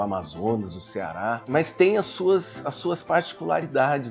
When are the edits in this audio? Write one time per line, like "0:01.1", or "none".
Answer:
0:01.4